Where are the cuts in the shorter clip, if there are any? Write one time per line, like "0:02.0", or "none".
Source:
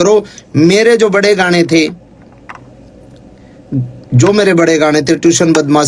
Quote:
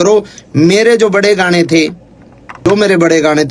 0:02.6